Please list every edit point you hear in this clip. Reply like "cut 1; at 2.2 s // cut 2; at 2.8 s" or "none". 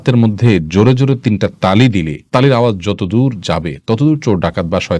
none